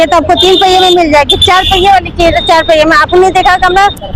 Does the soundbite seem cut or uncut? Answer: uncut